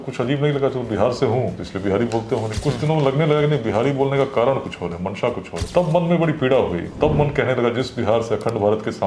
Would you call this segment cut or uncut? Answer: cut